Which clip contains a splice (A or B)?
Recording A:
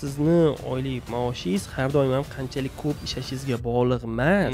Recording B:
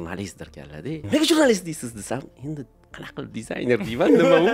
B